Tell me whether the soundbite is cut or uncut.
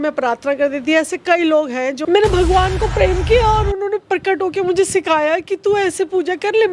cut